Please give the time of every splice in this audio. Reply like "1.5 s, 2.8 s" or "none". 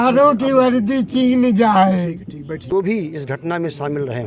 2.7 s